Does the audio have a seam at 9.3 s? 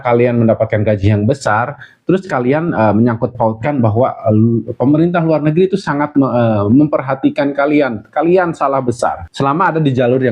yes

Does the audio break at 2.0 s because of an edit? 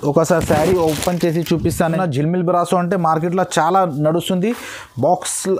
yes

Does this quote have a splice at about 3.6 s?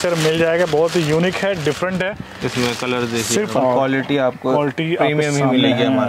yes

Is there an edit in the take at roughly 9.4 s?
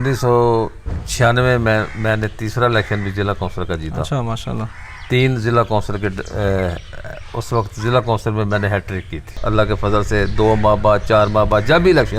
yes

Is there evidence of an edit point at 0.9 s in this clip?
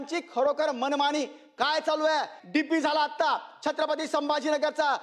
no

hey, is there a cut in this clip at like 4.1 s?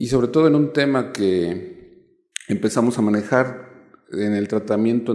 no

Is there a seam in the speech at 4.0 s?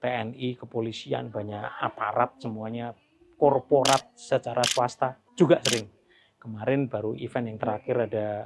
no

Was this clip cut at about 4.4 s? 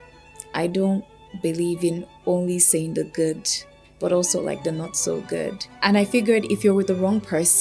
no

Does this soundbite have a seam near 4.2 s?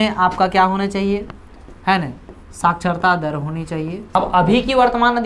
yes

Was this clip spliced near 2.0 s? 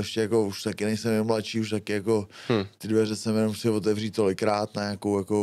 no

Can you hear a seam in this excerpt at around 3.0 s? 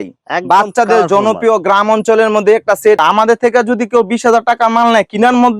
yes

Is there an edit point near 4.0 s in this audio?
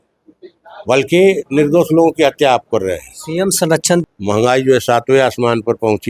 yes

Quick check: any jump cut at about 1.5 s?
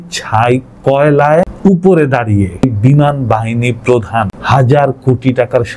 yes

